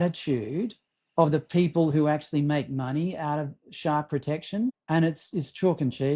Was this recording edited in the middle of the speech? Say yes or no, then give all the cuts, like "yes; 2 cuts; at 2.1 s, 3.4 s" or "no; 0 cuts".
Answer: yes; 1 cut; at 4.8 s